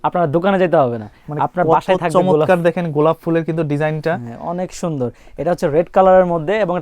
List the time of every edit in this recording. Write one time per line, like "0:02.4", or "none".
none